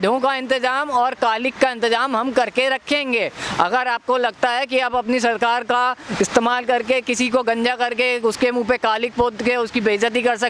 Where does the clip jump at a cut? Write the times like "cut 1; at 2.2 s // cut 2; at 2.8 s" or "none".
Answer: none